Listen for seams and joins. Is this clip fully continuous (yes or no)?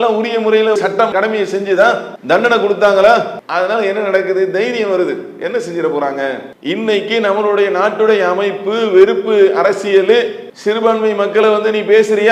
yes